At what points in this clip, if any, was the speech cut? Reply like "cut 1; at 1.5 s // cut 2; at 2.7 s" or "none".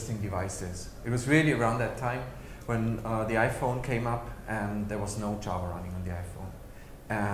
cut 1; at 1.2 s